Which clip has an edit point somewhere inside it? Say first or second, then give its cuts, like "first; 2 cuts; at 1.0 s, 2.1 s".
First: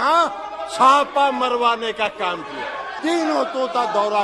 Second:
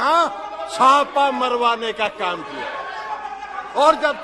first; 1 cut; at 2.9 s